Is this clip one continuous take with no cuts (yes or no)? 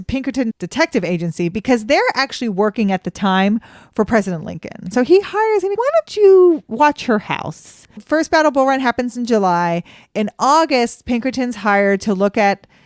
no